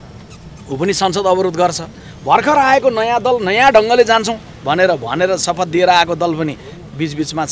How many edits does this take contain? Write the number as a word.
zero